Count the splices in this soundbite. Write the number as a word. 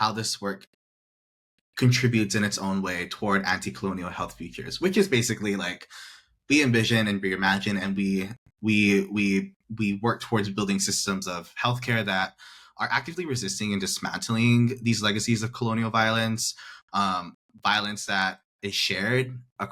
zero